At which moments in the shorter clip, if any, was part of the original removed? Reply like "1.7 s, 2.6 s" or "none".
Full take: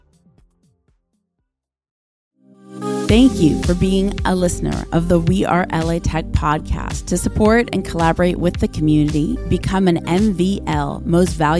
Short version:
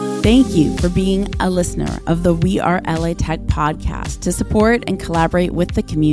none